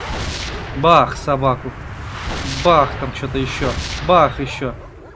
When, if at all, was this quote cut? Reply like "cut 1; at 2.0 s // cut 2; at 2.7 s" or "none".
none